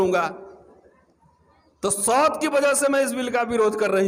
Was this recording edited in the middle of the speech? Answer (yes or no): no